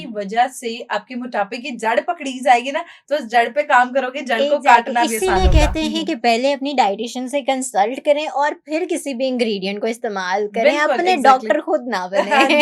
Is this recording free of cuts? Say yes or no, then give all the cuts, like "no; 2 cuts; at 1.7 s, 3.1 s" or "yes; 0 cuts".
yes; 0 cuts